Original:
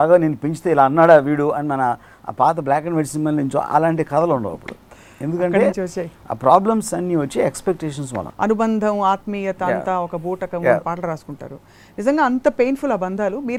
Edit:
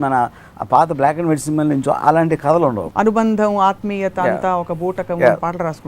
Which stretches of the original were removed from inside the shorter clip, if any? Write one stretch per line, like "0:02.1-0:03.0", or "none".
0:04.5-0:08.3